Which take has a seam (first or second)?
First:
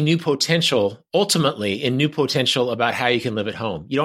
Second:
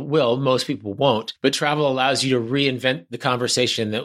second